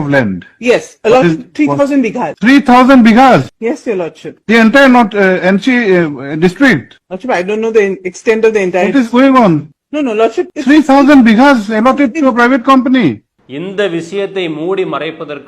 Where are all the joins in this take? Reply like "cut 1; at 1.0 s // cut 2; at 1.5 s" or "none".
cut 1; at 13.3 s